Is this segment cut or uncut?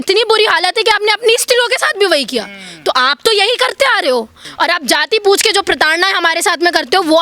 cut